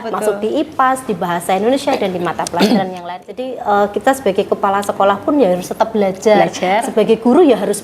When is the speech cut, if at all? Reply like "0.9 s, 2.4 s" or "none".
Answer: 3.2 s